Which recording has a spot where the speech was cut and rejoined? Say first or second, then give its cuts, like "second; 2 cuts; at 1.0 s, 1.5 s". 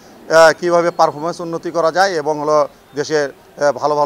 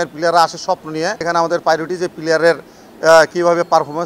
second; 1 cut; at 1.2 s